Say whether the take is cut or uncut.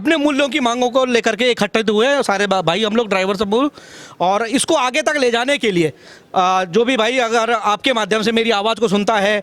uncut